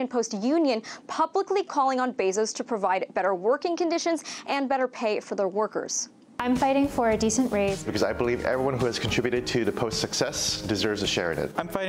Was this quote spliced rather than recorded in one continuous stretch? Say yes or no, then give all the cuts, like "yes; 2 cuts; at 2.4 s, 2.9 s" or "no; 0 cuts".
no; 0 cuts